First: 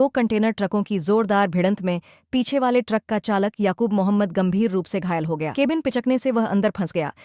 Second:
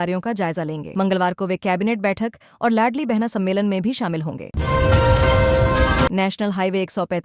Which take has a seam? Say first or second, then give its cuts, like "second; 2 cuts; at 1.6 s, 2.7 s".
second; 2 cuts; at 4.5 s, 6.1 s